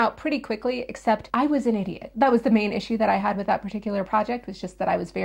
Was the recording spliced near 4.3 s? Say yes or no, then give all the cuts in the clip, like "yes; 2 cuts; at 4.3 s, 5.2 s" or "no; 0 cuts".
no; 0 cuts